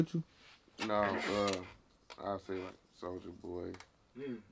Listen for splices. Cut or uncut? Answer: uncut